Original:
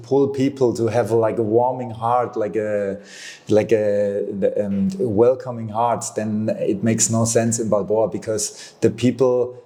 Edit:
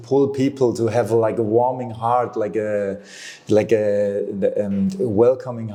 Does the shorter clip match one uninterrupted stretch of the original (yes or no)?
yes